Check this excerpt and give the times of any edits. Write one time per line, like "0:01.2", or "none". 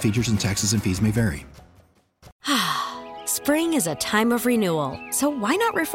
0:02.3